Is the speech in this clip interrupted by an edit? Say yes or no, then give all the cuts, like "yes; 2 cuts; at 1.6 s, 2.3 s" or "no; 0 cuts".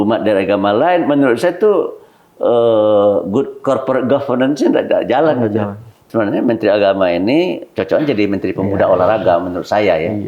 yes; 1 cut; at 6.0 s